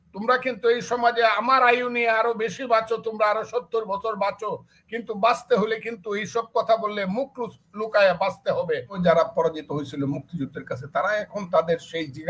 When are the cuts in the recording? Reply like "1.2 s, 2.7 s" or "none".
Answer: 8.9 s